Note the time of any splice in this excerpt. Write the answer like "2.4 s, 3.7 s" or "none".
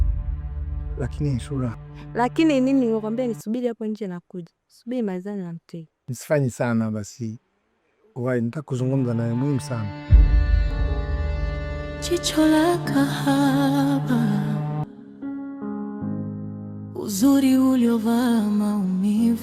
0.9 s, 9.8 s, 11.7 s